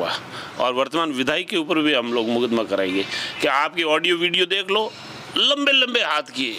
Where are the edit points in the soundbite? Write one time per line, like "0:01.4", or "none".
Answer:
none

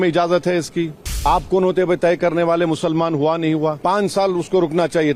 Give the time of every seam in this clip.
0:01.2
0:03.8

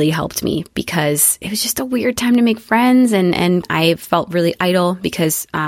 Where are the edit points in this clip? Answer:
0:03.6

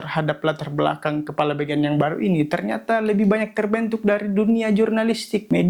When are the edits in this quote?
none

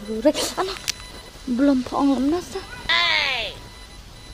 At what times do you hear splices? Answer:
0:01.3

